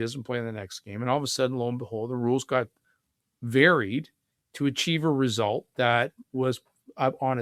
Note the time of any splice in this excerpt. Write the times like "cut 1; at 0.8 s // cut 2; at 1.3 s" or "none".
none